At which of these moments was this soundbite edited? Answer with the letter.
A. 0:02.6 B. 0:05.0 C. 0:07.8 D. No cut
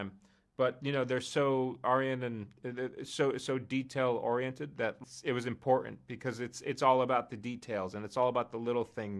B